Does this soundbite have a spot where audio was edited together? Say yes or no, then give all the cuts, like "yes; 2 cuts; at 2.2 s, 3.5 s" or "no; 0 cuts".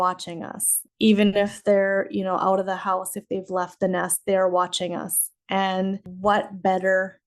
yes; 1 cut; at 6.1 s